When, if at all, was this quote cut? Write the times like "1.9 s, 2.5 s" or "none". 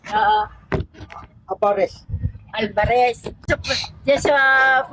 none